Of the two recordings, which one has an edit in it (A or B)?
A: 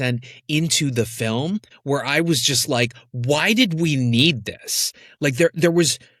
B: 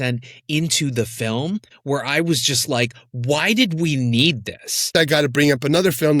B